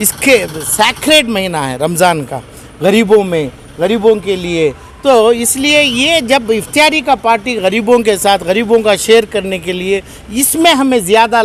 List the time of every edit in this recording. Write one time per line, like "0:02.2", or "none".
none